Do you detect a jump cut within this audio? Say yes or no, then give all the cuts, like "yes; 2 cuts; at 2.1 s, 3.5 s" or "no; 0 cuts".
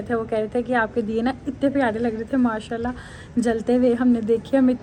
no; 0 cuts